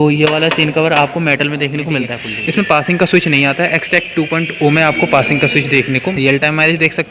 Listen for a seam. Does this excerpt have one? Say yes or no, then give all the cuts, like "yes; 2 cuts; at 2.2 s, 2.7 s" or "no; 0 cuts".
yes; 2 cuts; at 2.2 s, 6.0 s